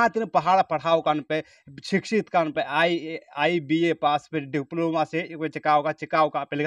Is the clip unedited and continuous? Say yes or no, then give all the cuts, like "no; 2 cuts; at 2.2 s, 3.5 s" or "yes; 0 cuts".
yes; 0 cuts